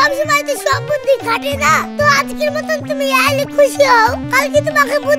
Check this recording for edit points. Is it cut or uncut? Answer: uncut